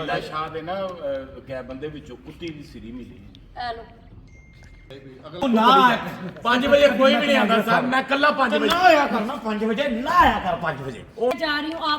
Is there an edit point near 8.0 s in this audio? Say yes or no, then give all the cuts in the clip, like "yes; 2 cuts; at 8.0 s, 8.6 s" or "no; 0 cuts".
no; 2 cuts; at 5.4 s, 11.3 s